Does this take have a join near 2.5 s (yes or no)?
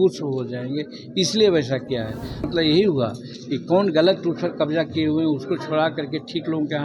yes